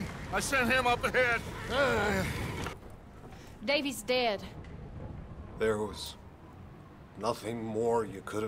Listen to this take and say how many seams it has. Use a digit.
1